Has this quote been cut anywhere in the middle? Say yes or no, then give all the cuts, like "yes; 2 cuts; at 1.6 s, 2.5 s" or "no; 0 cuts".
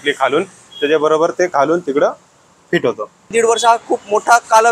yes; 1 cut; at 3.3 s